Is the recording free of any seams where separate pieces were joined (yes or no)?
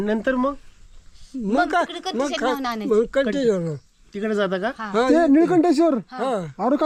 yes